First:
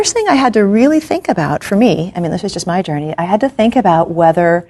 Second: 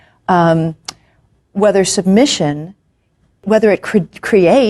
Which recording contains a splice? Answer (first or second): second